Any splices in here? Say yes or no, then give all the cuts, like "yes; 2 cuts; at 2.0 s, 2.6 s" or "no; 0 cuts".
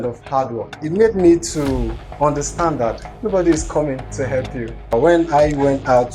yes; 2 cuts; at 0.9 s, 4.9 s